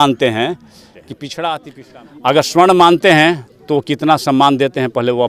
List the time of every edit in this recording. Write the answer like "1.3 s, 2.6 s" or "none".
1.8 s